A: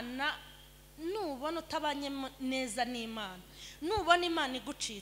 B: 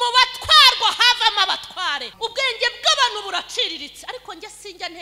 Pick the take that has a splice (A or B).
B